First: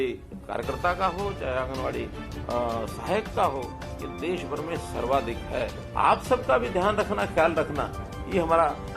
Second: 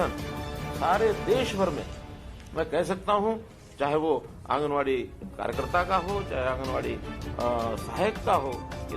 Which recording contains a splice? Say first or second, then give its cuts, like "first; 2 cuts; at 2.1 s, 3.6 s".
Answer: first; 1 cut; at 5.9 s